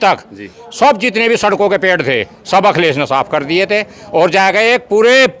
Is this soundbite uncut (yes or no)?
yes